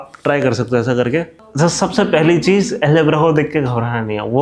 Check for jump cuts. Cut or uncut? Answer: cut